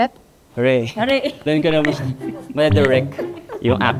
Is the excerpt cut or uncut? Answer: uncut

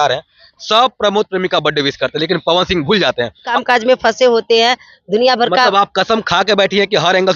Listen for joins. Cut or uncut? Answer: cut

